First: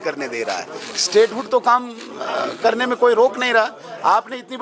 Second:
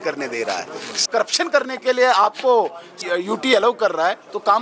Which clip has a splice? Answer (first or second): second